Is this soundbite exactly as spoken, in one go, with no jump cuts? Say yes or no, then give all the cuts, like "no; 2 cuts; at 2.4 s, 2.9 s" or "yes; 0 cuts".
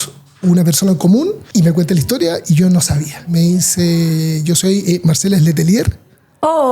no; 2 cuts; at 1.4 s, 3.3 s